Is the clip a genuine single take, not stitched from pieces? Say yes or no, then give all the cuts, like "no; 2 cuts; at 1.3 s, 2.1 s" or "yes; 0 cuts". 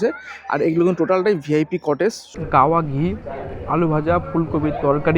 no; 1 cut; at 2.3 s